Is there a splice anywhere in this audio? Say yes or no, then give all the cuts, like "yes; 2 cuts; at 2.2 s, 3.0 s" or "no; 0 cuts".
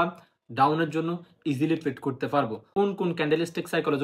yes; 1 cut; at 2.6 s